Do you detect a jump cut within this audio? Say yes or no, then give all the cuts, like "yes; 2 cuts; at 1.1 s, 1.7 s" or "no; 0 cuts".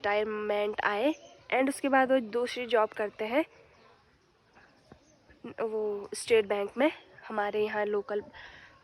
no; 0 cuts